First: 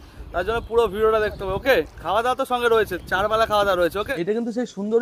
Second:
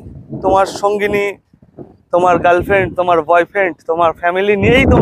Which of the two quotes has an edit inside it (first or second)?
first